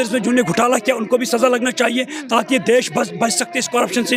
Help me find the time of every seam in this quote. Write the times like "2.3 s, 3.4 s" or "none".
none